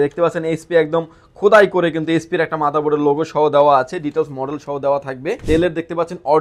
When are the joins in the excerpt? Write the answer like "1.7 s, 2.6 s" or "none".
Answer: 5.4 s